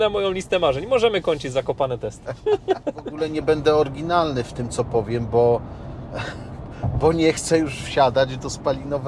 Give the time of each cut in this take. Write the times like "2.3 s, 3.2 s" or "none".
3.2 s